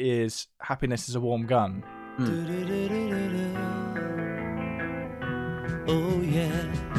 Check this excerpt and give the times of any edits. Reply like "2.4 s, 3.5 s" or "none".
none